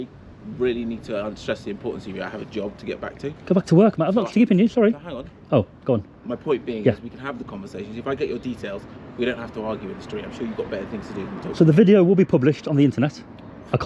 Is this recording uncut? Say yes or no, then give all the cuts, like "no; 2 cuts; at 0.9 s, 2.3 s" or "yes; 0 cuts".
yes; 0 cuts